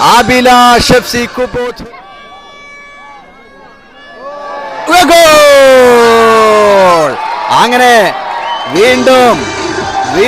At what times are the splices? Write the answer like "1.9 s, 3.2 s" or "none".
1.6 s